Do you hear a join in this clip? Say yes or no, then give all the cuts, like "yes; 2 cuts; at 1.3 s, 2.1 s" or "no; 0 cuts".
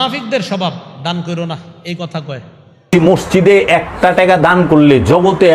yes; 1 cut; at 2.9 s